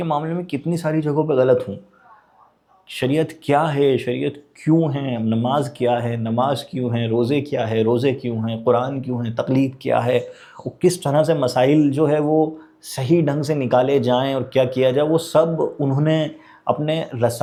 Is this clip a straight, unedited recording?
yes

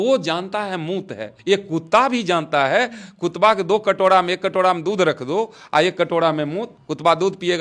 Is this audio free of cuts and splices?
yes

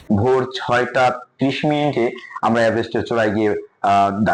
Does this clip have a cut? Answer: no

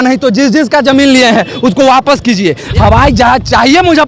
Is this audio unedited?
no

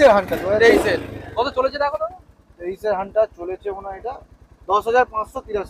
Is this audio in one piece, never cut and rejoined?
yes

